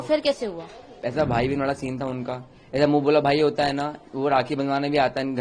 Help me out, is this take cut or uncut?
cut